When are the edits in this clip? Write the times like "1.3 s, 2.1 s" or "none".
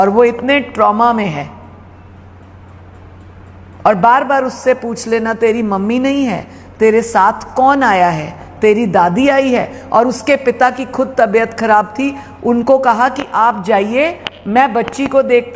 none